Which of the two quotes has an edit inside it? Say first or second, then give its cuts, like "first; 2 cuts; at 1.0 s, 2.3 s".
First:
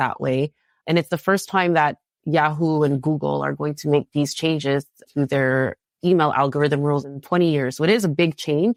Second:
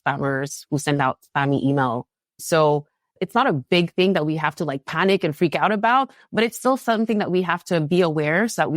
second; 1 cut; at 3.1 s